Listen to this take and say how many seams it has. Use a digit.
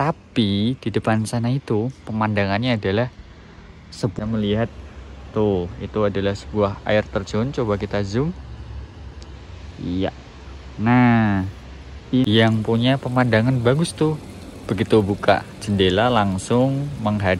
2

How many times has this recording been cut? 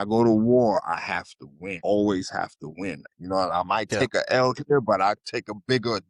2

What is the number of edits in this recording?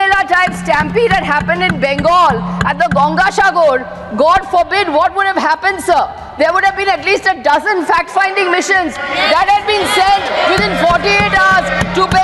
0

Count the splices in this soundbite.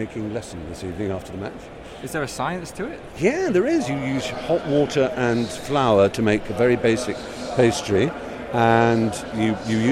0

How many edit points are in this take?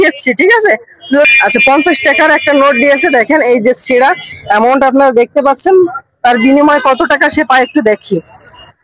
1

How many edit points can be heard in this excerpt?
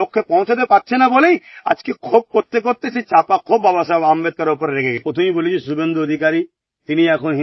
1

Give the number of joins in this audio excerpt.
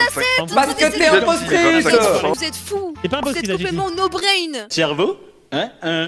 0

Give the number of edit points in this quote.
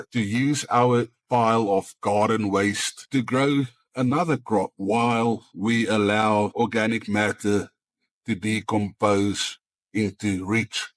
3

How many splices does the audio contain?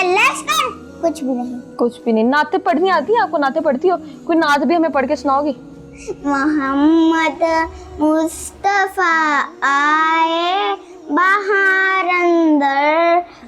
0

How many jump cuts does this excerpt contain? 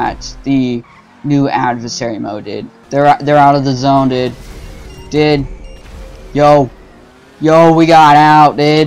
1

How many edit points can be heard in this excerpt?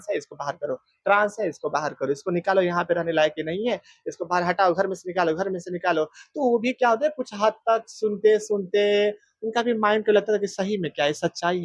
0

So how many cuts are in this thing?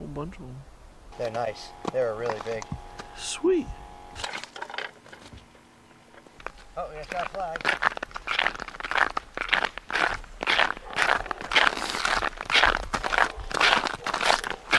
1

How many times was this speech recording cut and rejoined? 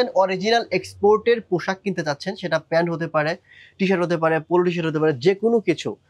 0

